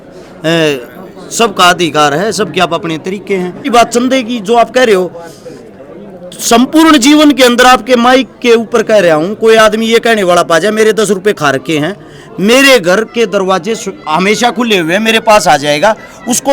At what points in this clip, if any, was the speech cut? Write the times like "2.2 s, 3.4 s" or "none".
3.7 s